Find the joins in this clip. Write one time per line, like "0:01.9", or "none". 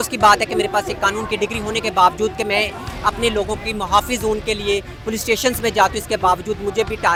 none